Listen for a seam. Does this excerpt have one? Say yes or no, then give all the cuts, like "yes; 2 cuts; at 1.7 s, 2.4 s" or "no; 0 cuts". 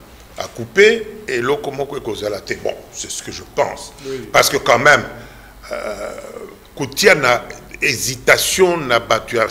yes; 1 cut; at 1.2 s